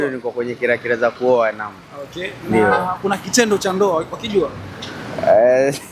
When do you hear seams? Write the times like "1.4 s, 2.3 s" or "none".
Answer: none

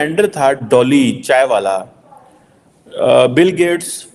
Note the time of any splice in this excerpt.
none

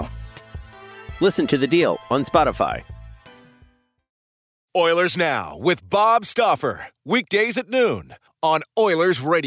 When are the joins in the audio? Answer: 4.5 s

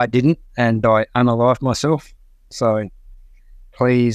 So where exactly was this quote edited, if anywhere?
none

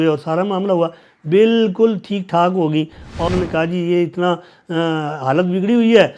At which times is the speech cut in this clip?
3.3 s

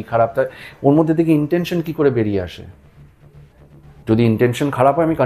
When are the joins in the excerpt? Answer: none

